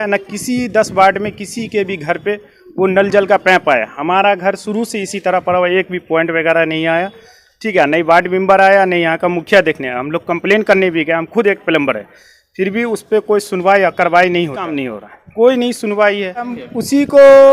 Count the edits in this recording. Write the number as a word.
one